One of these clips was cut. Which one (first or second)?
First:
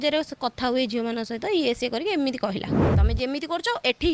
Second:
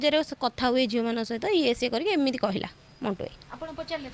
first